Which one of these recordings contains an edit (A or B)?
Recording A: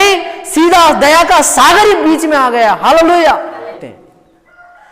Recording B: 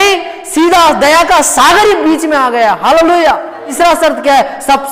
A